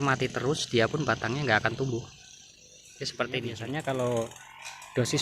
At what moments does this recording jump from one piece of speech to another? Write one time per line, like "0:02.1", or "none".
0:03.6